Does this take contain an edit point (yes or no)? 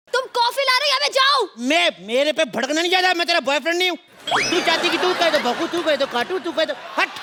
no